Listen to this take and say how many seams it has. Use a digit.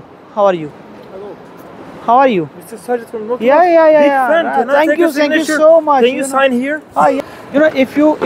1